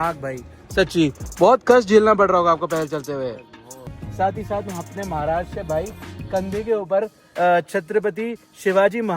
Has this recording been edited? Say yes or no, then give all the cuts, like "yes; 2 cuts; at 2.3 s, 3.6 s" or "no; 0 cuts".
yes; 1 cut; at 4.0 s